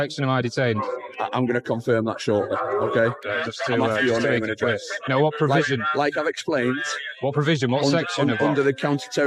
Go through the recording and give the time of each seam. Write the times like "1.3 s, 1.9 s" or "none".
3.3 s